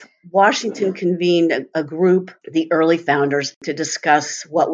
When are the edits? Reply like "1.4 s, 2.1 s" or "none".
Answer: 2.4 s, 3.6 s